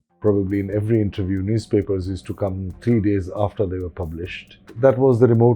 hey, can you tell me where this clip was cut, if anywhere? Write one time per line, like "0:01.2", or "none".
0:04.6